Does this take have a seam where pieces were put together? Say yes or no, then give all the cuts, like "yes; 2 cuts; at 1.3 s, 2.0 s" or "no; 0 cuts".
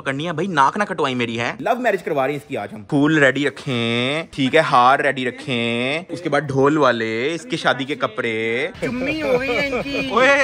yes; 3 cuts; at 1.6 s, 6.0 s, 8.7 s